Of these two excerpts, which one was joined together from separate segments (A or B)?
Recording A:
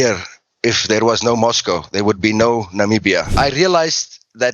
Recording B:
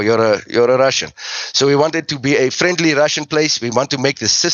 A